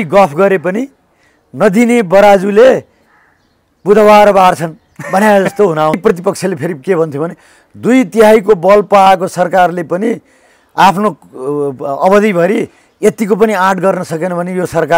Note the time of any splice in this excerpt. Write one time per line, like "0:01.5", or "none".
0:06.0